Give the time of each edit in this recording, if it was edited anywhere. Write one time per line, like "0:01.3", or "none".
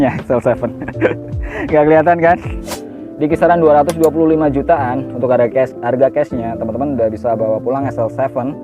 0:02.8

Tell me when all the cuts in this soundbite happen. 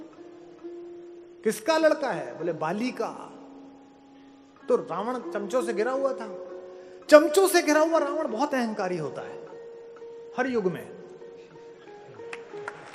none

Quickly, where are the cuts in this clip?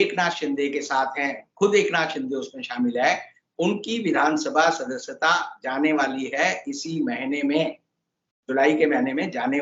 none

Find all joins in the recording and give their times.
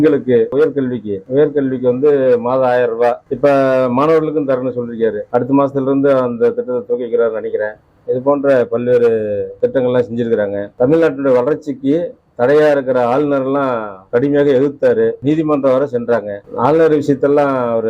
none

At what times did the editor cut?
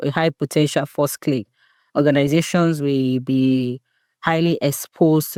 none

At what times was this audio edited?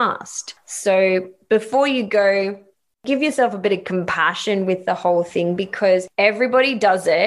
0:03.0

